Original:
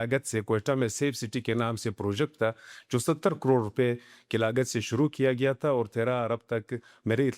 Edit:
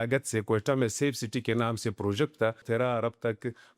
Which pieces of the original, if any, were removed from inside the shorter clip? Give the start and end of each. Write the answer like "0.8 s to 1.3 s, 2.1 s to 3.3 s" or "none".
2.6 s to 5.9 s